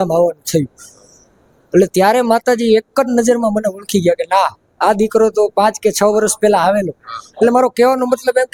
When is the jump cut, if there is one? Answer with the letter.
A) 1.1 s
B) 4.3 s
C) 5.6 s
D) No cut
D